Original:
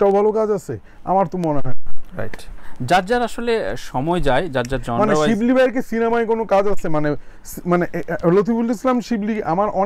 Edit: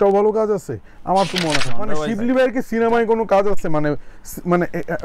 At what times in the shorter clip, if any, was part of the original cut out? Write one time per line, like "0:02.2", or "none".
0:01.9